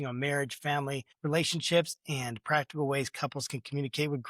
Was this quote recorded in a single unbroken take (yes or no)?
no